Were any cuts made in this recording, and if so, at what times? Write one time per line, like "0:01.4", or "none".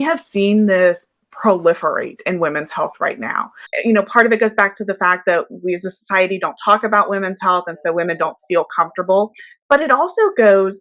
0:03.7
0:09.5